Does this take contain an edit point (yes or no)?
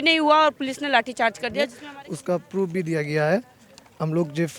yes